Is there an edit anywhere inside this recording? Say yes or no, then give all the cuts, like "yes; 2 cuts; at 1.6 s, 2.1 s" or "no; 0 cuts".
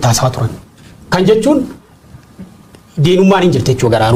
no; 0 cuts